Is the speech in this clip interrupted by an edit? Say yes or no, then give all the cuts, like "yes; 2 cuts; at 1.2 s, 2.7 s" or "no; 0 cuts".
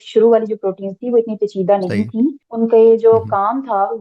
yes; 1 cut; at 2.4 s